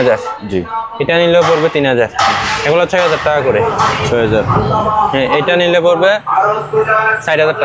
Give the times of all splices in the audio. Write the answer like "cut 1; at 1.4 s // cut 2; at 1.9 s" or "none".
none